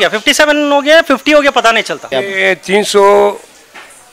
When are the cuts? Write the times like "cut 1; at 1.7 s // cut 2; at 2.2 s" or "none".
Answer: cut 1; at 2.0 s